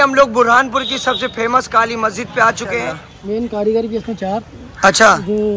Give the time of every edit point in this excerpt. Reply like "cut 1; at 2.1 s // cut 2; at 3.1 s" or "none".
cut 1; at 3.1 s